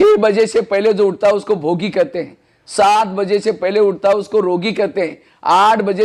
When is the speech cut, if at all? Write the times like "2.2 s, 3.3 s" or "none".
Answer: none